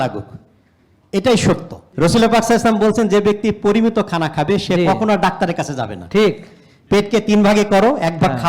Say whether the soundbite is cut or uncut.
cut